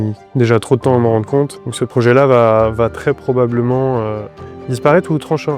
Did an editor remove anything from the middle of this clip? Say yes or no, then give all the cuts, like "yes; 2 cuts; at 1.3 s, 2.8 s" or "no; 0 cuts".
yes; 1 cut; at 1.6 s